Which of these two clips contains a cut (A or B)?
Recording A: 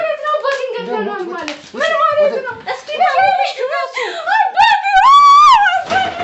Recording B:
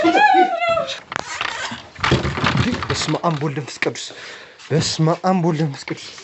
B